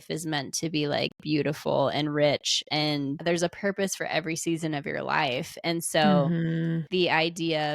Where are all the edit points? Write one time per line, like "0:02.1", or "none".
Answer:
0:03.2